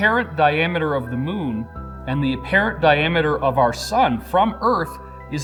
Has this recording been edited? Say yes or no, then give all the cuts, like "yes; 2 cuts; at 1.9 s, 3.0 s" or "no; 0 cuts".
no; 0 cuts